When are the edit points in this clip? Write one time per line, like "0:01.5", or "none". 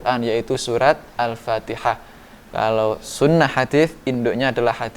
none